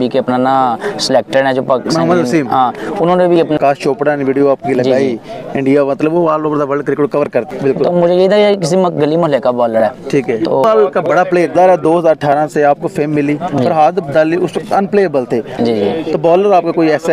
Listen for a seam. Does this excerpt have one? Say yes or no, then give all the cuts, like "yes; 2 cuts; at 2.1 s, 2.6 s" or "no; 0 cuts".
yes; 4 cuts; at 3.6 s, 7.5 s, 10.6 s, 15.5 s